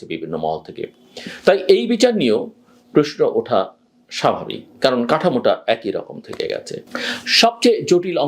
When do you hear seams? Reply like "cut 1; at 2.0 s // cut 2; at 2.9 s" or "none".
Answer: cut 1; at 6.9 s